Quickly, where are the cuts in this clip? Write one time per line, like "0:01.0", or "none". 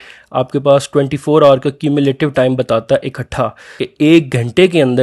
0:03.8